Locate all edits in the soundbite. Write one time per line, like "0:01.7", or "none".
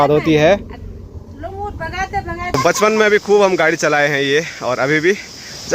0:02.5